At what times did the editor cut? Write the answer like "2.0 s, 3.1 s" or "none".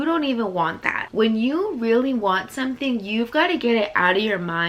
1.0 s